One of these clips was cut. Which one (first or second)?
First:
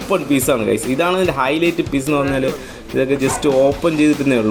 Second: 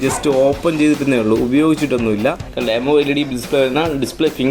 second